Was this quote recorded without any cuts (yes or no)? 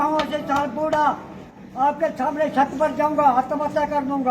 no